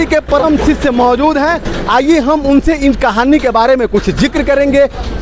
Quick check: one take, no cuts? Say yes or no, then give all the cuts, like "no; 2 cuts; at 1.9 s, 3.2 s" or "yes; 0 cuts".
yes; 0 cuts